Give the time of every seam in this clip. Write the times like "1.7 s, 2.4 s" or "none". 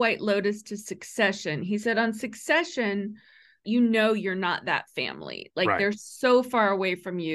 3.6 s